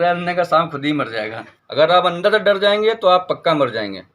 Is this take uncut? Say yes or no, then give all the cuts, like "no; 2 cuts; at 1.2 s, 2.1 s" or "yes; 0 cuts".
no; 1 cut; at 1.5 s